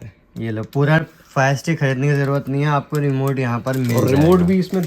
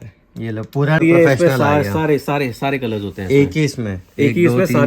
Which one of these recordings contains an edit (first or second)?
second